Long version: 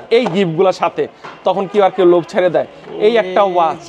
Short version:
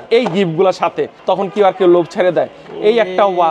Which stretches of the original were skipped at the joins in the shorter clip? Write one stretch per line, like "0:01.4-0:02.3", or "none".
0:01.1-0:01.3